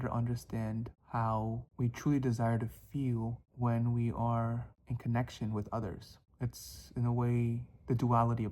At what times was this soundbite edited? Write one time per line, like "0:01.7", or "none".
0:01.0
0:01.7
0:03.4